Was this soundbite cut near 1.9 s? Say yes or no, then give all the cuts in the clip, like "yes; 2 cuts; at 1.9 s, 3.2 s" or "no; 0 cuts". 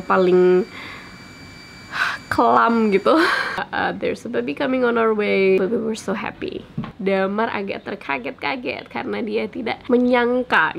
no; 3 cuts; at 3.6 s, 6.8 s, 9.8 s